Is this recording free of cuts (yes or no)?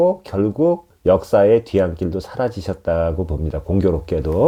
yes